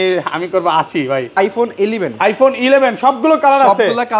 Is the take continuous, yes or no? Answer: no